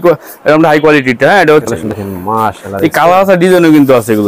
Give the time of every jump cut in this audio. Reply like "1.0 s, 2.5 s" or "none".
1.7 s